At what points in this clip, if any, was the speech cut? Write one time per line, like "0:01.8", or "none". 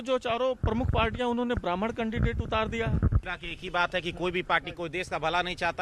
0:03.5

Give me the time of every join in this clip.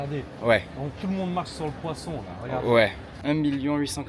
0:03.1

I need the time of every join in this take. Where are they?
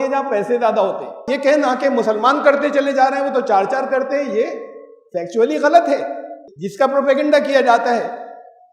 0:01.2

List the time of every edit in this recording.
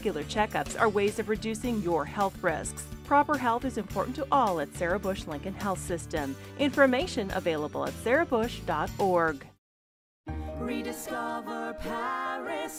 none

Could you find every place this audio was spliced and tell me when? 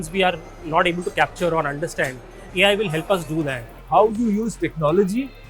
0:03.7

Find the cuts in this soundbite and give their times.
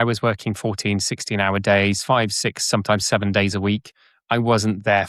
none

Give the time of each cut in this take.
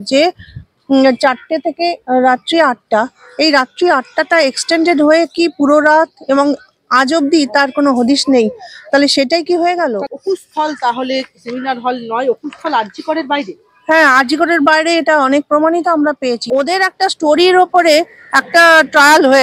0:10.0
0:16.4

